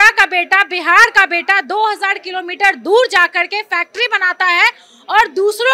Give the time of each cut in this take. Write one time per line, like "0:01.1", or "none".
none

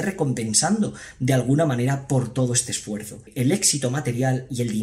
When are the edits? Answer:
0:03.3

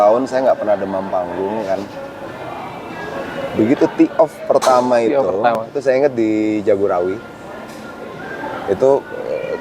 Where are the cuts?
none

